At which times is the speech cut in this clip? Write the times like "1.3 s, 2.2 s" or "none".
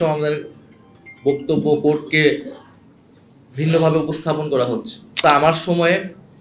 5.2 s